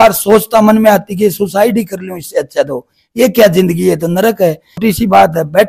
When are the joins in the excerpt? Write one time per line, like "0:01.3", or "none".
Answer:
0:04.8

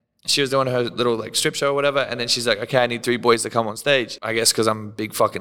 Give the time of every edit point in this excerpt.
0:04.2

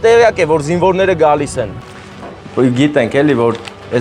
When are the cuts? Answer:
0:01.9

